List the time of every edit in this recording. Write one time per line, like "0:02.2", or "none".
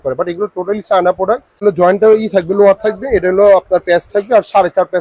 0:01.6